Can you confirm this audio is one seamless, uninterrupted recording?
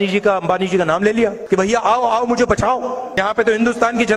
no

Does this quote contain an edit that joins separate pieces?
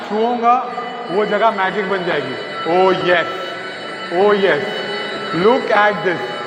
no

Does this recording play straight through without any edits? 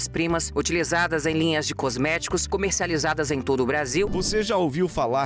no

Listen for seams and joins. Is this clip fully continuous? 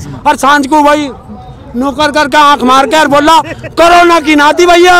yes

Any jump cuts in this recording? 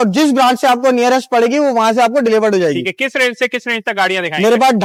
no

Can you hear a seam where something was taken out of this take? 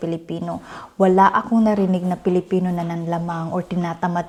no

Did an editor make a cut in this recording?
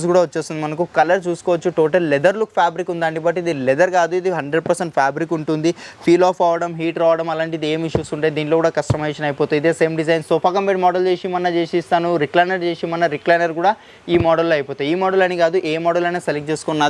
no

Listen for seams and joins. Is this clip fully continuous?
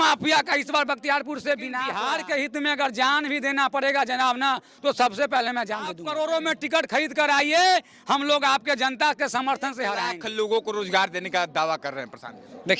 no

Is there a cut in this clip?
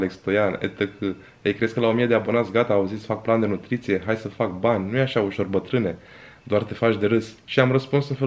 no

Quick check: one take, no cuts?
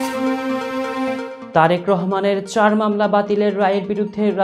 no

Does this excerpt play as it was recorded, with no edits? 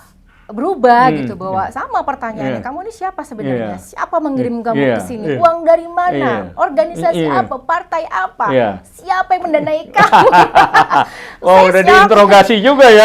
yes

